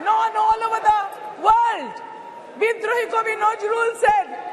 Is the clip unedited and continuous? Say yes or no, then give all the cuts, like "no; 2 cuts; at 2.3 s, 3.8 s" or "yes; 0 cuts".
yes; 0 cuts